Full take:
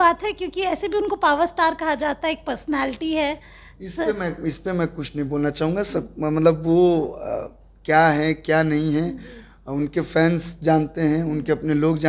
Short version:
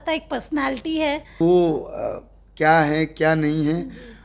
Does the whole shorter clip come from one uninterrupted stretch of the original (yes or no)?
no